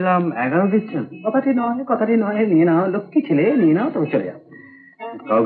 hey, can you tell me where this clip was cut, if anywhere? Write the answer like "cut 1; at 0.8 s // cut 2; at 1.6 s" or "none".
none